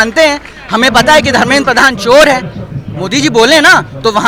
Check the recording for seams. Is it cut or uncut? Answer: uncut